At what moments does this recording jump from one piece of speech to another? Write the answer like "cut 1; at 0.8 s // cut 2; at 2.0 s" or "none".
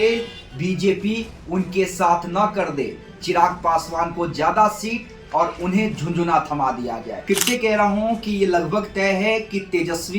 cut 1; at 7.2 s

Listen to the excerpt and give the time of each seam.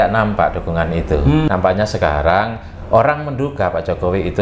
cut 1; at 1.5 s

